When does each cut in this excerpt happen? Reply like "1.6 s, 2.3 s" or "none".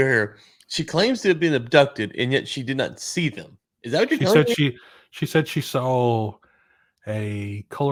none